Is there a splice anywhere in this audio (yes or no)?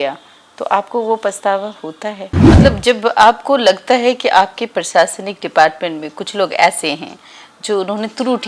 yes